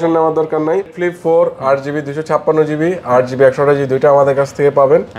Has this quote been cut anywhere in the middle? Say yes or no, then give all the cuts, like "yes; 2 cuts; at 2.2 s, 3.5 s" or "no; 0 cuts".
yes; 1 cut; at 0.9 s